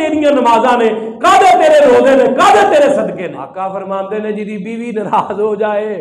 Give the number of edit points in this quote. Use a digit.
1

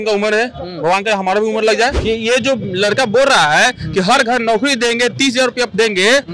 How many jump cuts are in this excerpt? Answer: 1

